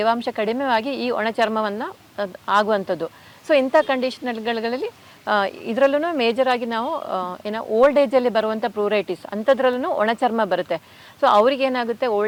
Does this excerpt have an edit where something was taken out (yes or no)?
no